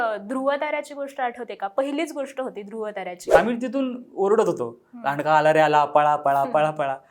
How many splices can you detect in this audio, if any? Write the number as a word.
one